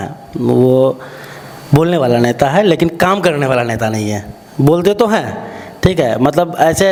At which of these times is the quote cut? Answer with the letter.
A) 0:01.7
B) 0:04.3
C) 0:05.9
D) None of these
D